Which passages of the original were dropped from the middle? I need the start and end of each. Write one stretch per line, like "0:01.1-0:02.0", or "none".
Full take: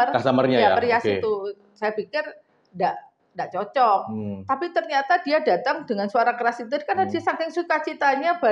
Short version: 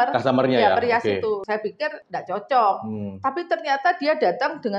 0:01.7-0:03.0